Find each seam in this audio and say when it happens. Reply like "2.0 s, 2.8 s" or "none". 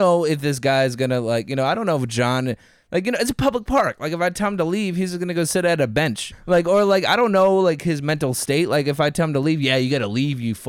6.2 s